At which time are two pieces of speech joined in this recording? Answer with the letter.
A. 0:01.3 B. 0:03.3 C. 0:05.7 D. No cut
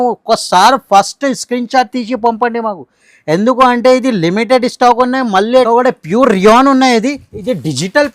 C